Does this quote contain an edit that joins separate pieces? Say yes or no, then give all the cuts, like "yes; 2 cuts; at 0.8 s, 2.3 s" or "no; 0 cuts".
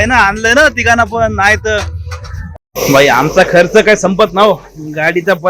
yes; 1 cut; at 2.6 s